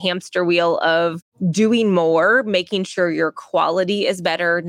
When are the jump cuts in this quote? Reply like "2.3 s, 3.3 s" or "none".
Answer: 1.3 s

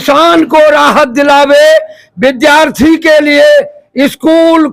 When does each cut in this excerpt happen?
none

